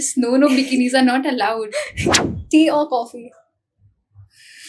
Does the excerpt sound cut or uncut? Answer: cut